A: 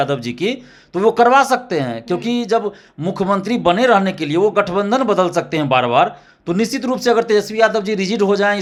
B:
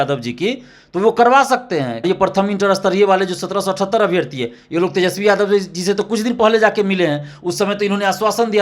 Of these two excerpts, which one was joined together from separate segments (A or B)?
B